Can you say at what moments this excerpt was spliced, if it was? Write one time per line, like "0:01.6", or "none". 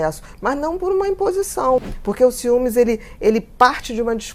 0:01.9

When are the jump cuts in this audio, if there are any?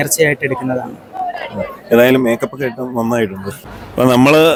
none

